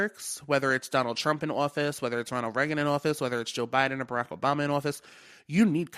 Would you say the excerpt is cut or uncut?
uncut